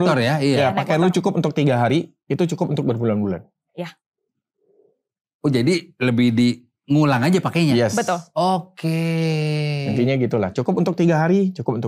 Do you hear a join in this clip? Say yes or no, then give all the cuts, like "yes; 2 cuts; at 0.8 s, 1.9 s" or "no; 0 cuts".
no; 0 cuts